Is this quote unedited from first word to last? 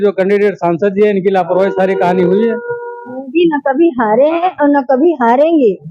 no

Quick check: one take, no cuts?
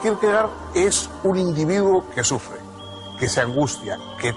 no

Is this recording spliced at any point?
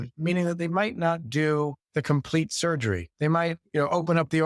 yes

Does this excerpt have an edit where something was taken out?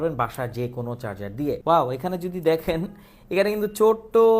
yes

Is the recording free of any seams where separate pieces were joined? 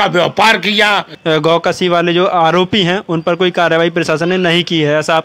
no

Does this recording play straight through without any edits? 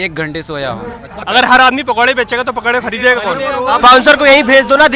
no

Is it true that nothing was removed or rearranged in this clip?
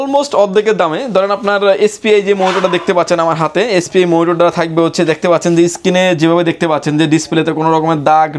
yes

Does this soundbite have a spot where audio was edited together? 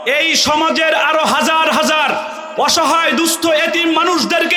no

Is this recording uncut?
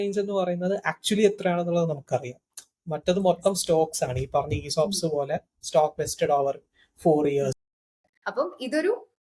no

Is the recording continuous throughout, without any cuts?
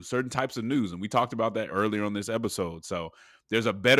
no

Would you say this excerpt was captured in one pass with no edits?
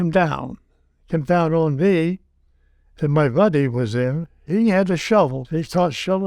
no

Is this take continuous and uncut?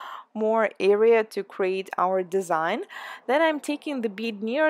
yes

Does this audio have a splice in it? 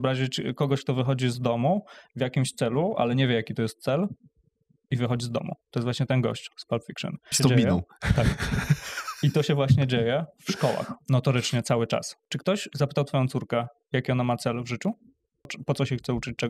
yes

